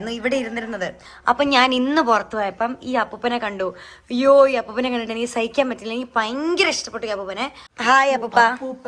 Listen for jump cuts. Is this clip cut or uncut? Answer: cut